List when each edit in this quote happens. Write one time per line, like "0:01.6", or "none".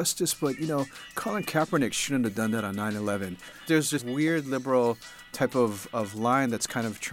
0:03.6